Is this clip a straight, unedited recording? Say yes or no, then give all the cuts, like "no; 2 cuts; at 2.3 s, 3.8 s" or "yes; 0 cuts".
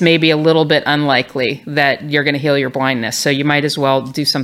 yes; 0 cuts